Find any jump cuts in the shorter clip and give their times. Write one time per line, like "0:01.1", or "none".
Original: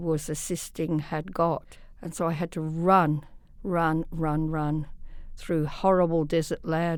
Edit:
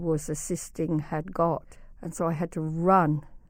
none